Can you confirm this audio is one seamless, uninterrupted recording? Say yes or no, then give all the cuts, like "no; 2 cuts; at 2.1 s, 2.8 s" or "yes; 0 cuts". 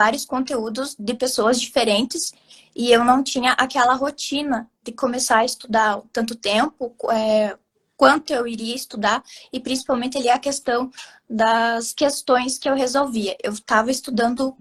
yes; 0 cuts